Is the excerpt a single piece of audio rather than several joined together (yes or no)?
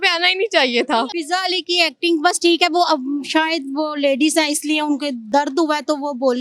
no